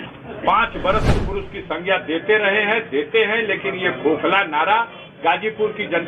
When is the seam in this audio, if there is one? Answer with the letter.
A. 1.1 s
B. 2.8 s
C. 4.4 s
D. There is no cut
A